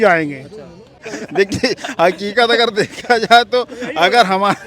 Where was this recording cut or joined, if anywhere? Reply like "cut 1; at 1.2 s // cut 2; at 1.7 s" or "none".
cut 1; at 1.1 s